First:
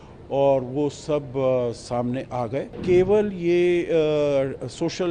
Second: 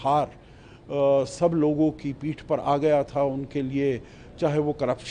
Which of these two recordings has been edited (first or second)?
first